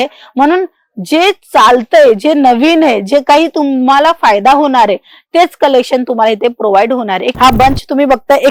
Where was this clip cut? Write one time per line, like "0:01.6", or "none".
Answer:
0:07.3